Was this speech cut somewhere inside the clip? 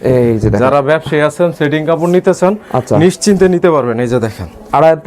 no; 0 cuts

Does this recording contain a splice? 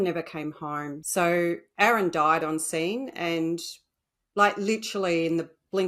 yes; 1 cut; at 0.9 s

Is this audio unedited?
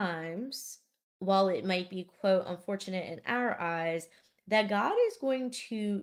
yes; 0 cuts

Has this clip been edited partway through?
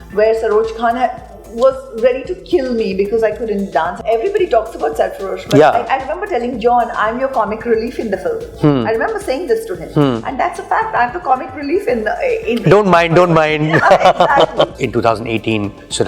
yes; 2 cuts; at 4.0 s, 14.7 s

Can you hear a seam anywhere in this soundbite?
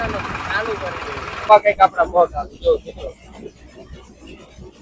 yes; 1 cut; at 1.3 s

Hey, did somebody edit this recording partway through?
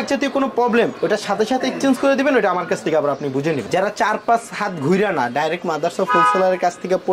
yes; 1 cut; at 3.6 s

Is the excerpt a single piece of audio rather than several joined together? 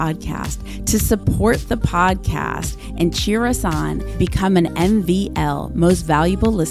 yes; 0 cuts

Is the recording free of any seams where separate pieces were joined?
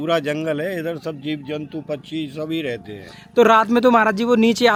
yes; 0 cuts

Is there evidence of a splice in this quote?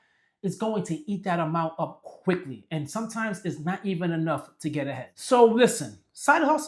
yes; 1 cut; at 5.1 s

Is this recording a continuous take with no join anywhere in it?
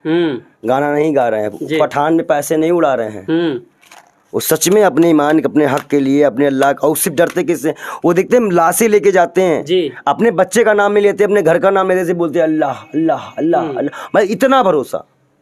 yes; 0 cuts

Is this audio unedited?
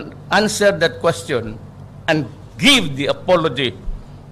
no; 1 cut; at 1.2 s

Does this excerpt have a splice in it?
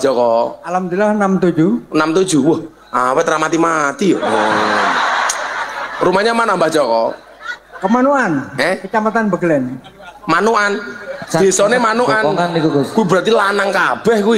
no; 0 cuts

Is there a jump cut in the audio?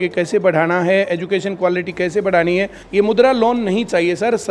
yes; 1 cut; at 2.8 s

